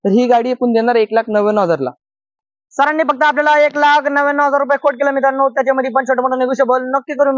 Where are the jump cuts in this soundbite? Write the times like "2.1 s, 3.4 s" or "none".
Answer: none